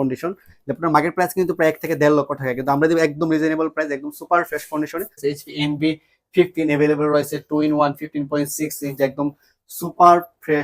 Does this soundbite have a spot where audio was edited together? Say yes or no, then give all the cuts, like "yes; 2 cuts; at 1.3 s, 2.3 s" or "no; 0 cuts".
yes; 1 cut; at 5.2 s